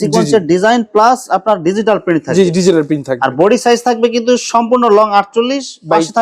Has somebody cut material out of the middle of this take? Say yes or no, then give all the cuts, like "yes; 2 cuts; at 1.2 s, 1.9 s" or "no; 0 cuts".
no; 0 cuts